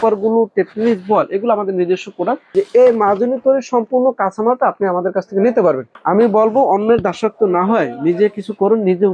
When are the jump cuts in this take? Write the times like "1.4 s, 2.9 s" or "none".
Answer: 2.5 s, 5.9 s